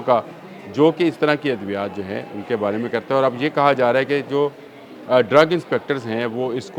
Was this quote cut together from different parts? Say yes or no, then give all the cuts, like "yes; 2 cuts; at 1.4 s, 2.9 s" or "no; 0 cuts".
no; 0 cuts